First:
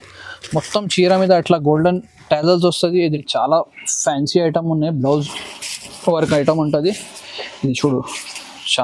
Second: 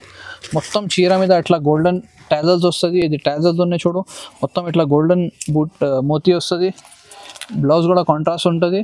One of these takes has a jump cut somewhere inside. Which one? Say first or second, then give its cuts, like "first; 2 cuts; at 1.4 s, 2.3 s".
first; 1 cut; at 3.1 s